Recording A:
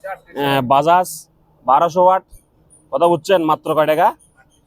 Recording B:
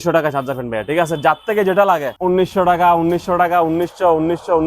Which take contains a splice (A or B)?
B